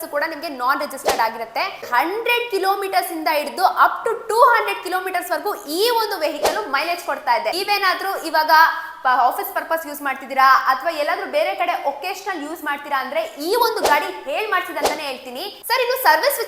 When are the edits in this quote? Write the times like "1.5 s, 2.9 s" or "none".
1.9 s, 7.5 s, 15.5 s